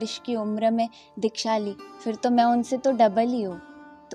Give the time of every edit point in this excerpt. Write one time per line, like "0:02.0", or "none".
none